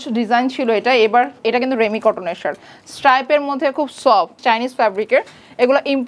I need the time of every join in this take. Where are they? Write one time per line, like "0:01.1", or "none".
0:01.3
0:04.4

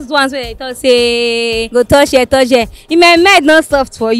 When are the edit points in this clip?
0:01.6

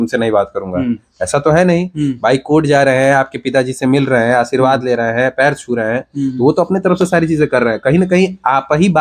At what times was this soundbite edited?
none

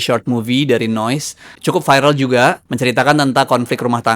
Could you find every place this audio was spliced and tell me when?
0:01.5
0:02.7

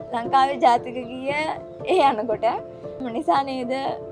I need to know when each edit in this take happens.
0:03.0

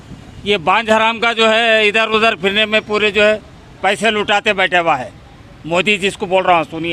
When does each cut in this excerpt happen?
none

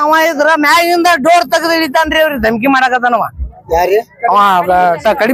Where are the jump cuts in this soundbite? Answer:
none

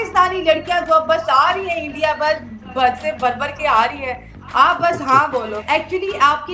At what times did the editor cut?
0:05.6

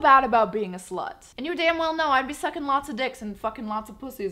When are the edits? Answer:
0:01.3

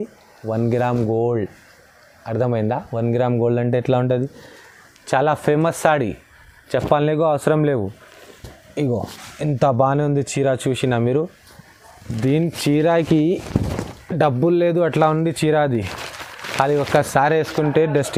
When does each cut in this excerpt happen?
none

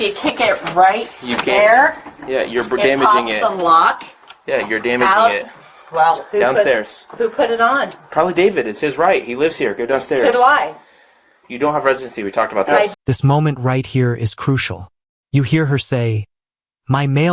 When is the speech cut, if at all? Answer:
0:12.9

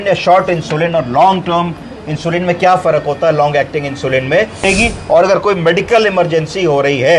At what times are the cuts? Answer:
0:04.6

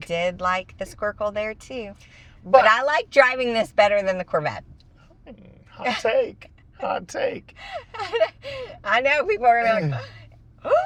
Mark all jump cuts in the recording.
none

